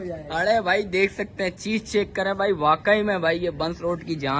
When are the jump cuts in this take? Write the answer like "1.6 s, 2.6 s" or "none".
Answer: none